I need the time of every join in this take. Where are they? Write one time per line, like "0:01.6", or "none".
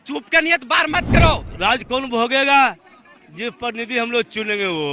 0:01.5